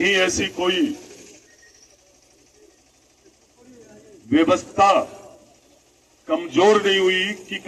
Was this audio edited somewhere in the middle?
no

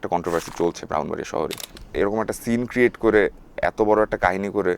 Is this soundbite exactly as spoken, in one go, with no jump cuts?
no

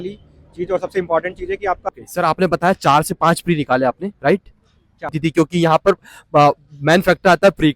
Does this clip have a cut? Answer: yes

